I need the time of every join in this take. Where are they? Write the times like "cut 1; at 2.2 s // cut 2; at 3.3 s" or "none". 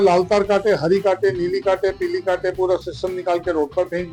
none